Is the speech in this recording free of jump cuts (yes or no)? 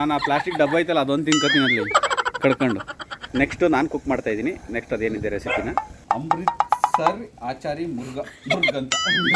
no